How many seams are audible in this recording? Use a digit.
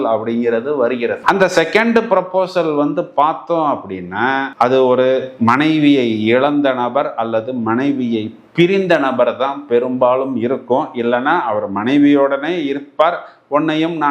0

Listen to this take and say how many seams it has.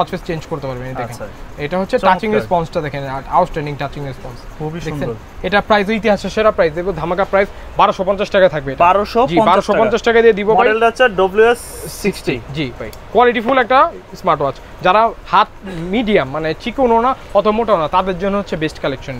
0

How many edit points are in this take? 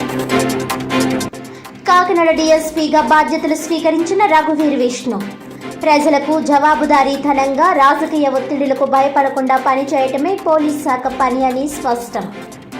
1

